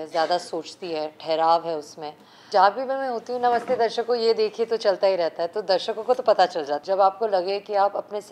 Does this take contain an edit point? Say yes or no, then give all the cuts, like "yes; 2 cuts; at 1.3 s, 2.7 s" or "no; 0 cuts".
yes; 2 cuts; at 2.4 s, 6.7 s